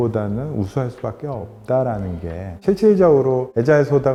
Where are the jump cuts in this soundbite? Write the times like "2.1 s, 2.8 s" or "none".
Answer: none